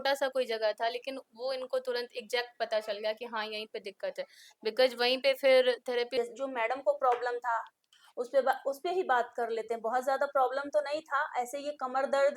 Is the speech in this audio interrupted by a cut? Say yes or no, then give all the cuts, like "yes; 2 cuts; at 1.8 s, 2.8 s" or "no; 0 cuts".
yes; 1 cut; at 6.1 s